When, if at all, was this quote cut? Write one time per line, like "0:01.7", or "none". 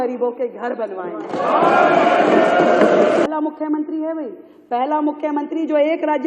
0:03.2